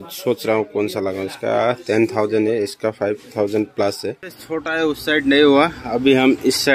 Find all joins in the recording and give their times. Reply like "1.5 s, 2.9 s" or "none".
4.3 s